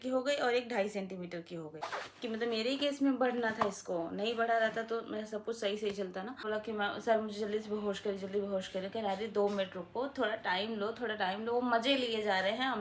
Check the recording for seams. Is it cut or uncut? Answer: cut